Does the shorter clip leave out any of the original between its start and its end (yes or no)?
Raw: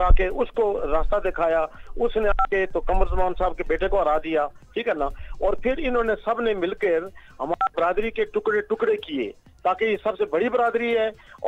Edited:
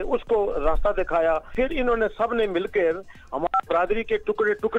yes